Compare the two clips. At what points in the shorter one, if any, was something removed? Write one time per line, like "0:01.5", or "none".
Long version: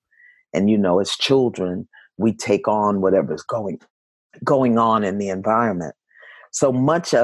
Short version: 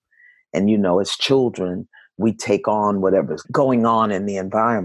0:03.4